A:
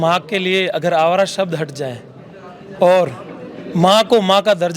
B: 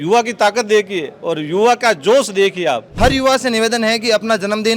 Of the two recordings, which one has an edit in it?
B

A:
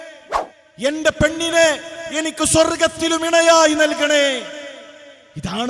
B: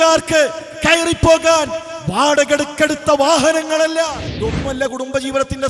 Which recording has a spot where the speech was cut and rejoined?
B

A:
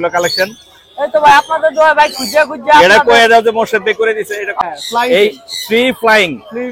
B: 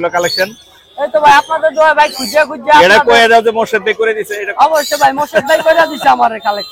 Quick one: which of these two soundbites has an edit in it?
A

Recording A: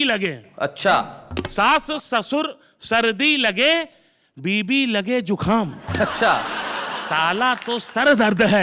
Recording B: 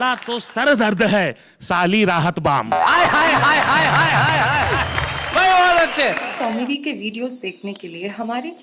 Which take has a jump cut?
B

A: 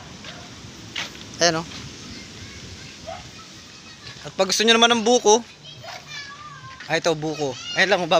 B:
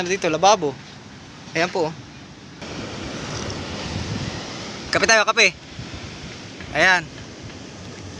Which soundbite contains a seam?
B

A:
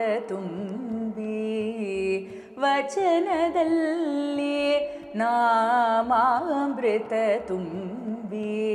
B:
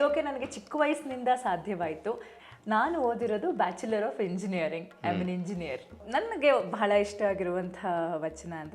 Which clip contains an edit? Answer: B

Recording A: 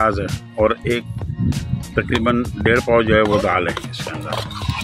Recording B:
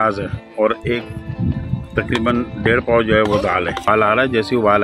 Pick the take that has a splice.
B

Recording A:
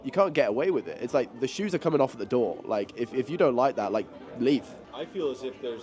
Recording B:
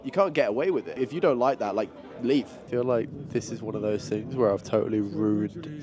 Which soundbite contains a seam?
B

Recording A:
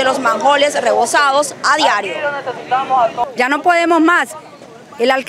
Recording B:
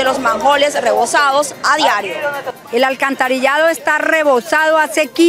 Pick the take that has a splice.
B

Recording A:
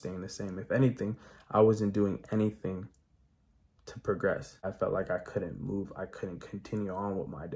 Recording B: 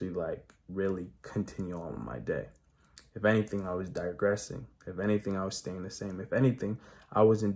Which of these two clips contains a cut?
A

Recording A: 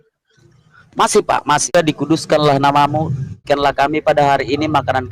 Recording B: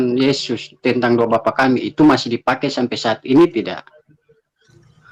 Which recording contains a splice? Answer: A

